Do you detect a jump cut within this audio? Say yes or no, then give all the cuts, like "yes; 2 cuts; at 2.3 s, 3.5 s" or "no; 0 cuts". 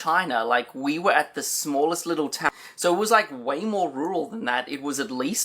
yes; 1 cut; at 2.5 s